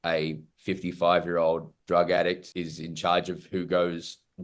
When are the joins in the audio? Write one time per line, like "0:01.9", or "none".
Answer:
0:01.7